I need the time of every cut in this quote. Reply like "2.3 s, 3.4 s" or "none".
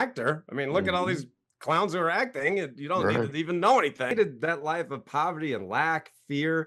4.1 s

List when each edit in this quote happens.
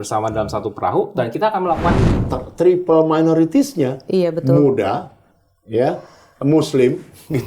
2.2 s

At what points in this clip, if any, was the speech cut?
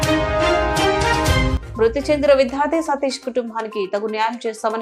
1.6 s

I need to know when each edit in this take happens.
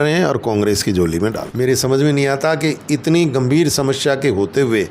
1.5 s

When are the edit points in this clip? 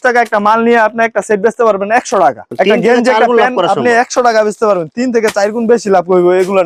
none

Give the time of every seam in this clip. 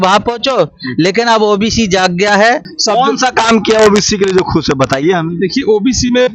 2.7 s

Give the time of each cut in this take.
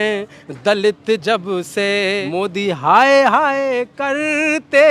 2.2 s

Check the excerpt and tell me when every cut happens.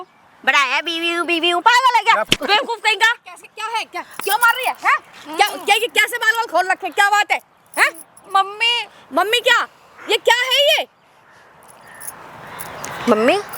none

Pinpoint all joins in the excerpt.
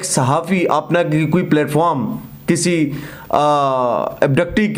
none

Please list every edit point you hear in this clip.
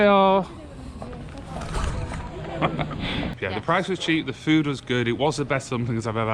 3.3 s

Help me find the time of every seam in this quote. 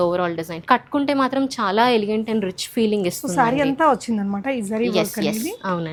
none

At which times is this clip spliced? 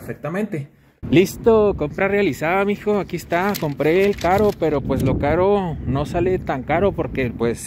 1.0 s

